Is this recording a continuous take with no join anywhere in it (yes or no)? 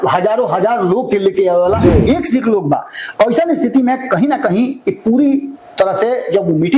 yes